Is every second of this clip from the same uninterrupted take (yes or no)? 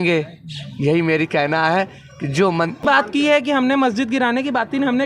no